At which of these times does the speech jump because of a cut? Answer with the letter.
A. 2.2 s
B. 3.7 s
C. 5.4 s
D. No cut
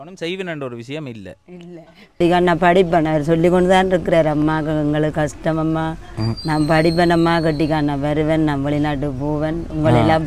A